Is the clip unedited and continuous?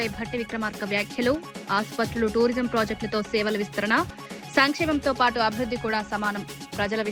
yes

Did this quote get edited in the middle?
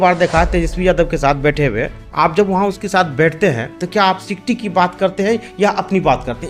no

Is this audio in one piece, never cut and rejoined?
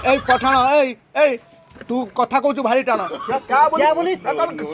no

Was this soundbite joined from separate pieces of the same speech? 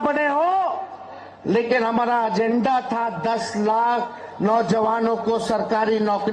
no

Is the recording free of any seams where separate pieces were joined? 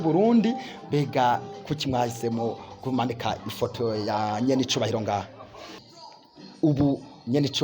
no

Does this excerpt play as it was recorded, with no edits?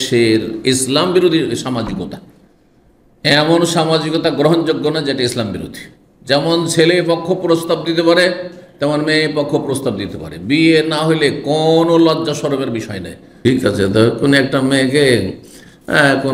no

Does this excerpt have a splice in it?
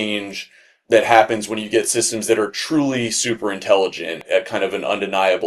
no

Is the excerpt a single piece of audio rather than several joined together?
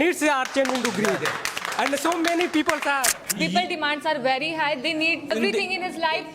no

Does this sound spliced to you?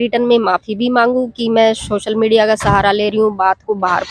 no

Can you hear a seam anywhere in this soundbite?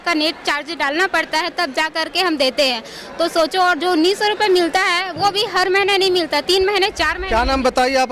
no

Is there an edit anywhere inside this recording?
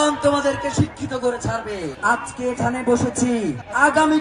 yes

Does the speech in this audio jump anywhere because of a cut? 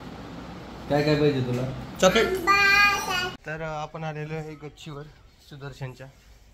yes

